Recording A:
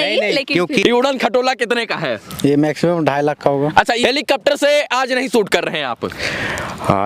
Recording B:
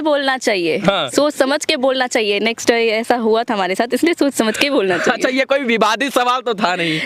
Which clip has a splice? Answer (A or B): A